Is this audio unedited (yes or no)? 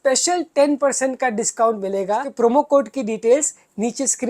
no